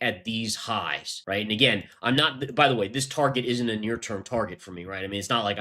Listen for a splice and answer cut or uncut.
cut